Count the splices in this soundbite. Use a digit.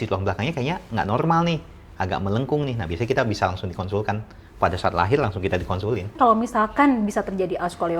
1